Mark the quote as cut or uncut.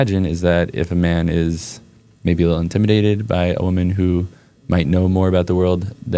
uncut